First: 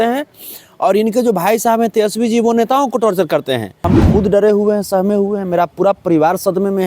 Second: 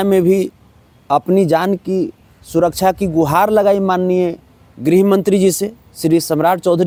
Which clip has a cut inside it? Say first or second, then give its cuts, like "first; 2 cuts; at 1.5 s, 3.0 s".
first; 1 cut; at 3.9 s